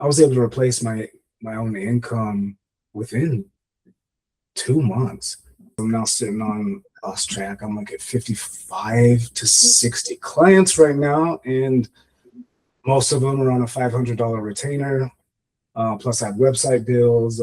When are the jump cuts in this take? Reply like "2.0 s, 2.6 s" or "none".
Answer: 5.7 s